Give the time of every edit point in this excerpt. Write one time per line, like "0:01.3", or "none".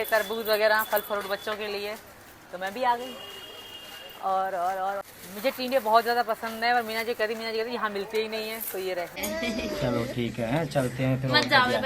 0:09.2